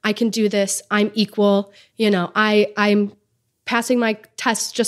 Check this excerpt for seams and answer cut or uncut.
uncut